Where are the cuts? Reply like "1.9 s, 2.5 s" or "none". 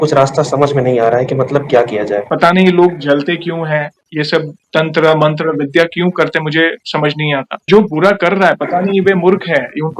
2.3 s